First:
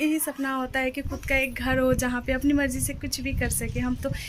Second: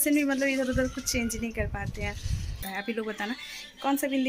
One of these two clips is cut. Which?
second; 1 cut; at 2.6 s

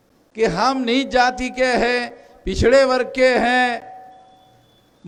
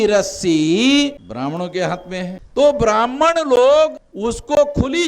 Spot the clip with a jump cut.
second; 3 cuts; at 1.2 s, 2.4 s, 4.1 s

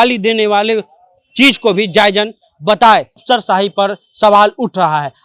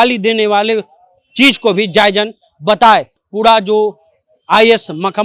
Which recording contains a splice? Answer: first; 1 cut; at 3.2 s

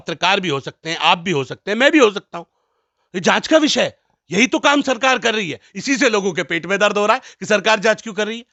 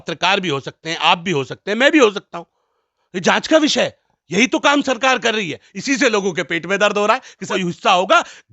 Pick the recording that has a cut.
second; 1 cut; at 7.4 s

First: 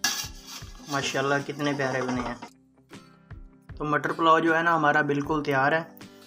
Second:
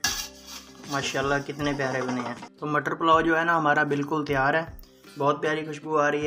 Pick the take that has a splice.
second; 1 cut; at 2.5 s

